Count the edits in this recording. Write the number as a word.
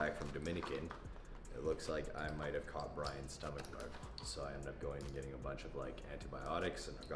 zero